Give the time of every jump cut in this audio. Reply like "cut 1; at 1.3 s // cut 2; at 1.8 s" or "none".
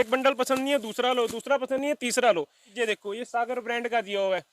cut 1; at 2.7 s